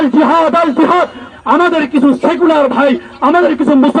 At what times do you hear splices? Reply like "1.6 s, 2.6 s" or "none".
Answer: 1.3 s